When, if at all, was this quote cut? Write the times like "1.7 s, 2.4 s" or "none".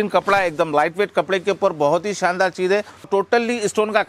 3.1 s